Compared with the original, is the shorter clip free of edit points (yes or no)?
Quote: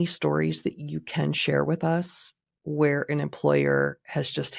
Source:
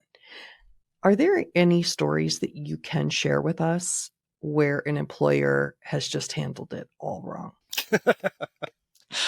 yes